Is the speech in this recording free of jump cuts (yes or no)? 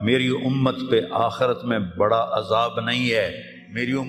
yes